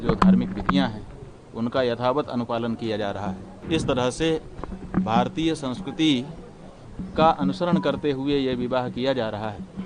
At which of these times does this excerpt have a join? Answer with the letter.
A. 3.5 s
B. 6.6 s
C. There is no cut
A